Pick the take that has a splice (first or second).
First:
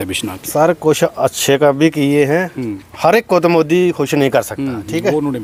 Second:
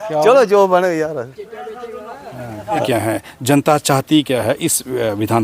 second